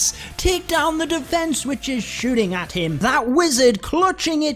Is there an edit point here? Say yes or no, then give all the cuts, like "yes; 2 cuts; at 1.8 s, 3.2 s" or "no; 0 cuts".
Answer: yes; 1 cut; at 3.0 s